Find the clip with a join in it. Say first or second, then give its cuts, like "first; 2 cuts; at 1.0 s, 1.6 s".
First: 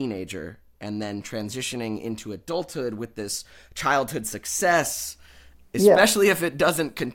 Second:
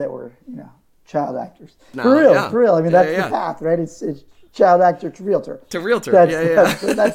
second; 1 cut; at 1.8 s